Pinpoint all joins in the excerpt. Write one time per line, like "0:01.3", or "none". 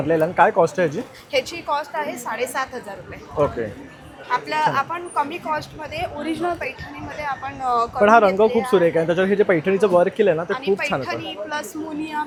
none